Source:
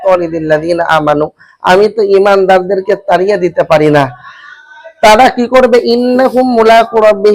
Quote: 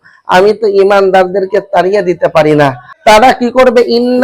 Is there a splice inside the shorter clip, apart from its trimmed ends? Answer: yes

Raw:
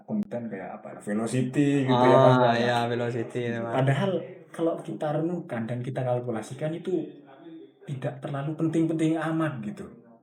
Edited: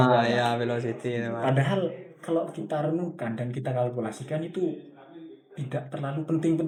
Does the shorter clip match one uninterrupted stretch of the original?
yes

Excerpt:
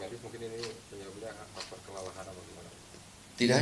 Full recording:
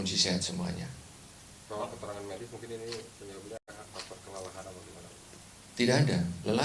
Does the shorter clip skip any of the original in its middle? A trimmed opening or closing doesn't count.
yes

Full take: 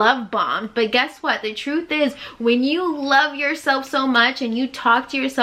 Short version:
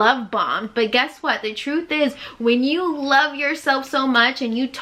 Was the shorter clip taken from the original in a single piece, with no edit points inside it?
yes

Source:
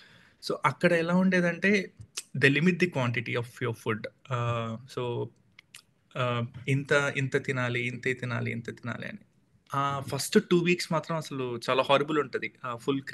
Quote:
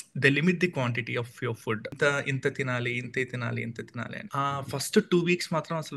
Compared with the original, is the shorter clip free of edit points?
no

